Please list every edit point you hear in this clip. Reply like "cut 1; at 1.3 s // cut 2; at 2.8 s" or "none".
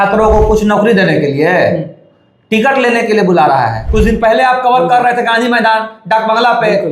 cut 1; at 3.9 s

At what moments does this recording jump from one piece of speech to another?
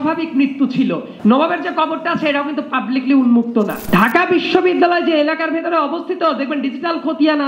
cut 1; at 1.1 s // cut 2; at 3.8 s

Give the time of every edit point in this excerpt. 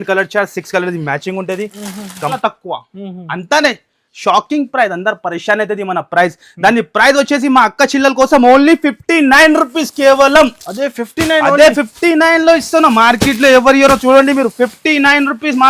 cut 1; at 2.4 s

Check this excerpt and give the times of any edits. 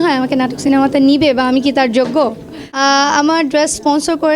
cut 1; at 2.8 s

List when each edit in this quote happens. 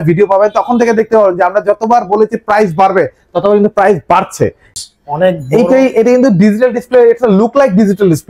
cut 1; at 4.8 s

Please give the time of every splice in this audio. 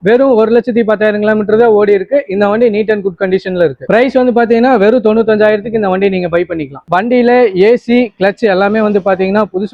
cut 1; at 6.8 s

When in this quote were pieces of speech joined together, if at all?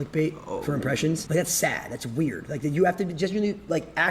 cut 1; at 1.2 s // cut 2; at 2.6 s

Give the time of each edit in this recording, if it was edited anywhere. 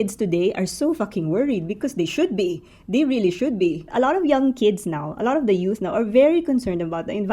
cut 1; at 3.8 s

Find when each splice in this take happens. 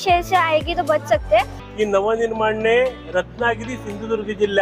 cut 1; at 1.6 s

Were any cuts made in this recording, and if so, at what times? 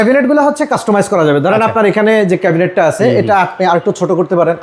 none

